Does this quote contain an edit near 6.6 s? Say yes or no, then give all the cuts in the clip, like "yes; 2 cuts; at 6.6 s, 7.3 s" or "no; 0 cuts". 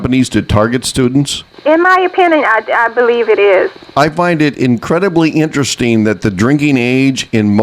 no; 2 cuts; at 1.4 s, 3.8 s